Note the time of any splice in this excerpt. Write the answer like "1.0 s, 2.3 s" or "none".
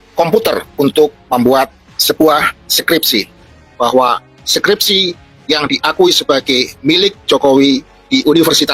3.7 s

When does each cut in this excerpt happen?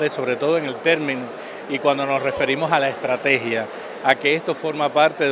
1.5 s

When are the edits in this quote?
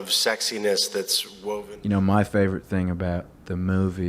1.7 s

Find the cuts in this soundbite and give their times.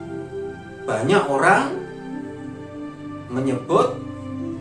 2.1 s, 3.2 s

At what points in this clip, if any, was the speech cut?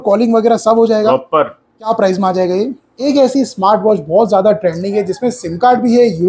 1.9 s, 3.0 s

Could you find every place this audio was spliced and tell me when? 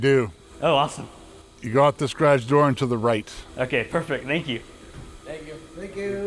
none

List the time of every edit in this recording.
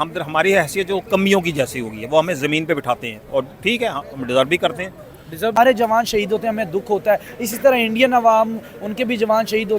5.5 s

